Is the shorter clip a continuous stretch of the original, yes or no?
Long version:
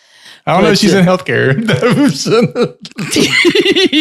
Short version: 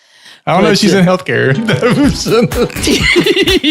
no